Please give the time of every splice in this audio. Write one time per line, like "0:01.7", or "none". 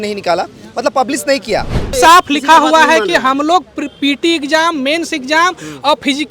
0:01.9